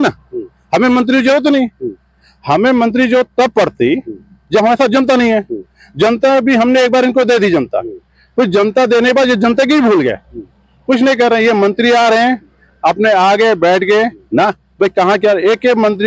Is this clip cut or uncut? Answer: uncut